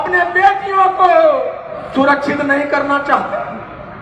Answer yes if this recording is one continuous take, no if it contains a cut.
yes